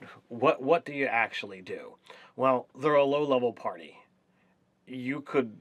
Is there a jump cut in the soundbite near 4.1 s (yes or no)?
no